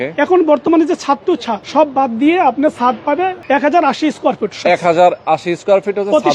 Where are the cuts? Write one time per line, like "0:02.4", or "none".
0:01.6
0:03.4

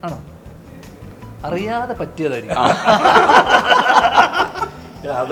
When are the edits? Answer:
none

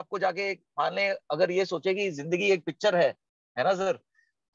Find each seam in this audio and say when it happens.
none

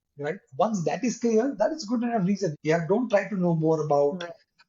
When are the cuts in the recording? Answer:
0:02.6

